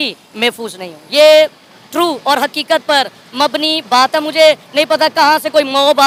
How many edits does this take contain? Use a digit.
0